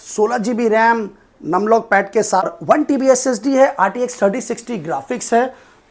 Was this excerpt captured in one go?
no; 1 cut; at 2.5 s

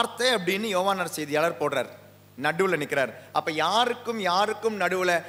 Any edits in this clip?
no; 0 cuts

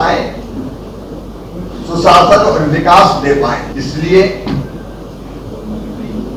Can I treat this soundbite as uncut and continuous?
no; 1 cut; at 3.7 s

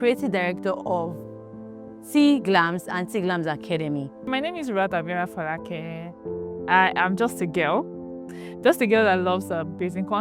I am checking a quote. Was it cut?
yes; 1 cut; at 4.1 s

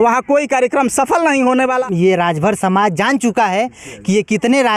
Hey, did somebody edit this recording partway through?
yes; 1 cut; at 1.8 s

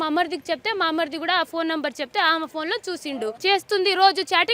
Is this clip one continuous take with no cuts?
no; 1 cut; at 3.4 s

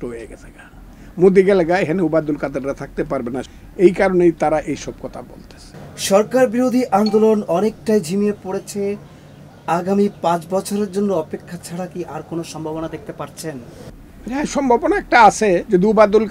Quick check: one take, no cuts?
yes; 0 cuts

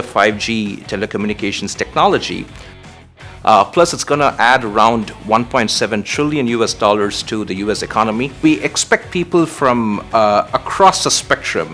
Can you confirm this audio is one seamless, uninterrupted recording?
no; 2 cuts; at 2.8 s, 8.4 s

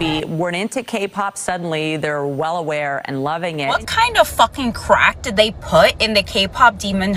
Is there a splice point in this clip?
no; 0 cuts

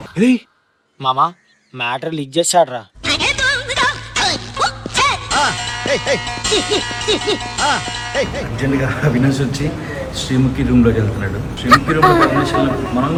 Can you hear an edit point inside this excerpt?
no; 0 cuts

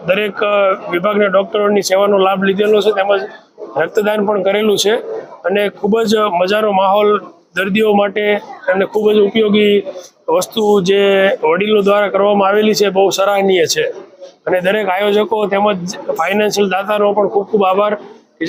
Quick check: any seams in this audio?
no; 0 cuts

